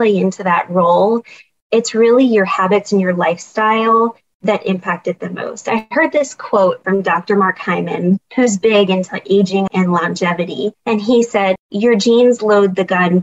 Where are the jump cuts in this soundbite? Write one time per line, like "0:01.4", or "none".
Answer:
0:06.8
0:08.3
0:09.7
0:10.8
0:11.6